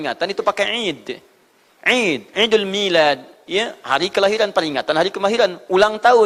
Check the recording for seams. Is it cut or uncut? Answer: uncut